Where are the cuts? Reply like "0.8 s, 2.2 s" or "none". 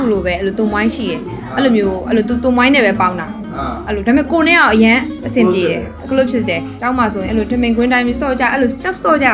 6.7 s